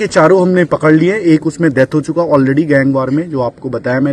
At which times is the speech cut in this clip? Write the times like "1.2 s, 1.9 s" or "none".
none